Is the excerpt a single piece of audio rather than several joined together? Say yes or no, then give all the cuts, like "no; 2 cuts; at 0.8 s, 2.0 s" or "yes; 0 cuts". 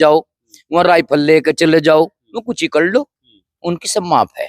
yes; 0 cuts